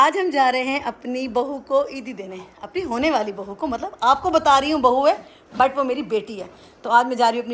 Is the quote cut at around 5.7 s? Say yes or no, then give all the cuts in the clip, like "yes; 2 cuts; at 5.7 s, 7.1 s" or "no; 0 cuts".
no; 0 cuts